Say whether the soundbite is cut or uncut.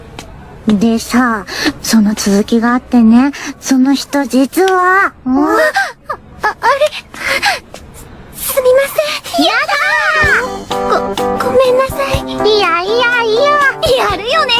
cut